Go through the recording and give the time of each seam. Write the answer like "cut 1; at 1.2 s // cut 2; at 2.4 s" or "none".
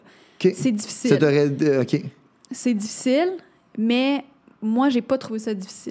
none

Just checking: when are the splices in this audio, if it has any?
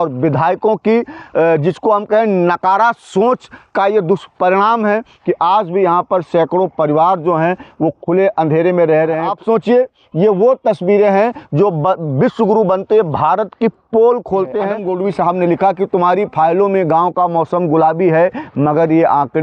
cut 1; at 9.3 s // cut 2; at 14.8 s

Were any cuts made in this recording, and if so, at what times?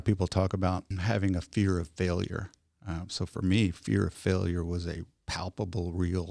cut 1; at 0.9 s

